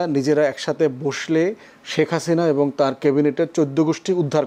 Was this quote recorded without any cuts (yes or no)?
yes